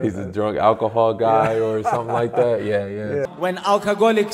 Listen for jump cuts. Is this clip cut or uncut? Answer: cut